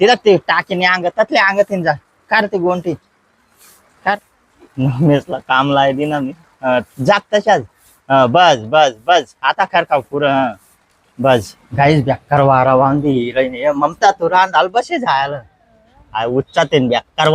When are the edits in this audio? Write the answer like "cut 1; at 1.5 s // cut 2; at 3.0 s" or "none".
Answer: cut 1; at 4.2 s // cut 2; at 11.6 s